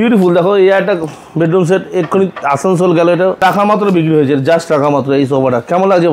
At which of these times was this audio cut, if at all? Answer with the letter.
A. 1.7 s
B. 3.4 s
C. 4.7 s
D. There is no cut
B